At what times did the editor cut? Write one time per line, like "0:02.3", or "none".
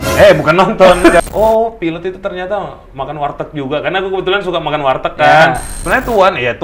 0:01.2
0:05.7